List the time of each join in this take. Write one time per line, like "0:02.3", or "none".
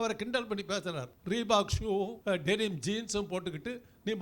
0:01.1
0:02.2